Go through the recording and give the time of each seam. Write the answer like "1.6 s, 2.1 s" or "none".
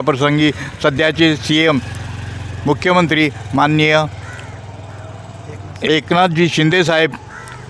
none

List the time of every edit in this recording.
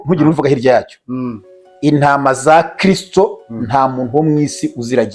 none

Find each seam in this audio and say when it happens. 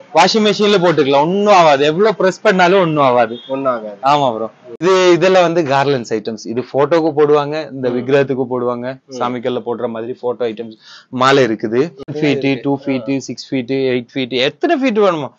4.6 s, 12.1 s

